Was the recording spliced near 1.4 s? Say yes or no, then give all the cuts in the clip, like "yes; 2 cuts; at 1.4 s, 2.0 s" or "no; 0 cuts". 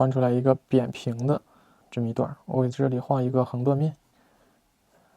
no; 1 cut; at 4.1 s